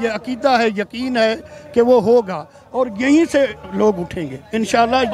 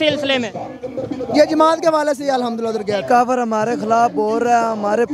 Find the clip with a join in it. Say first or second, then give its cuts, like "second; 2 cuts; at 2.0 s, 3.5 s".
second; 1 cut; at 3.0 s